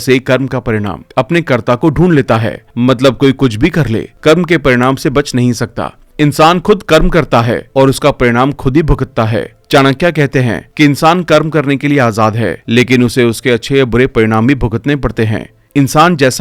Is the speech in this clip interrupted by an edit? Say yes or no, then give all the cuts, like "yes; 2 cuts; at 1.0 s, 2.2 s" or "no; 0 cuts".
no; 0 cuts